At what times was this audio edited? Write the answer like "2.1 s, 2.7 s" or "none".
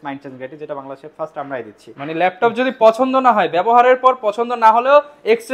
none